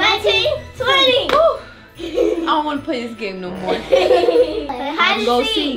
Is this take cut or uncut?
cut